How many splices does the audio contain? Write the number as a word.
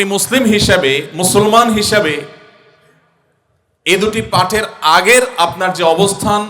zero